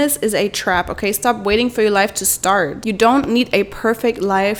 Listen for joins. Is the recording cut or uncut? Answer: uncut